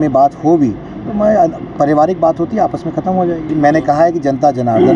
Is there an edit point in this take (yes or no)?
yes